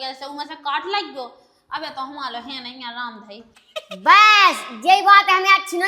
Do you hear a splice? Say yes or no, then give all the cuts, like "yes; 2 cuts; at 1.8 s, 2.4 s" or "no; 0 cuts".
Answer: no; 0 cuts